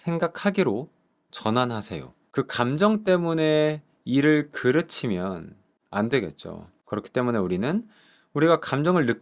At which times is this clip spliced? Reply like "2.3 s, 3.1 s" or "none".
2.2 s